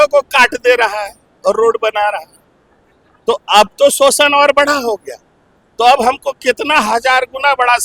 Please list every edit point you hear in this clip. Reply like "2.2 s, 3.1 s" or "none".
none